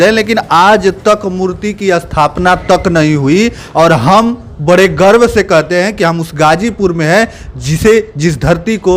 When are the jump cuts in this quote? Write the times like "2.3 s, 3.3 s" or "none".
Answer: none